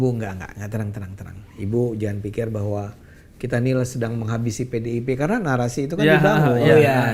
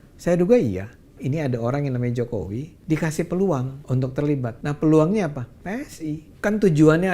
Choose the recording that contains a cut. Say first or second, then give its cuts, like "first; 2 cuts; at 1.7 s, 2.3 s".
second; 5 cuts; at 1.2 s, 2.7 s, 3.8 s, 4.6 s, 6.3 s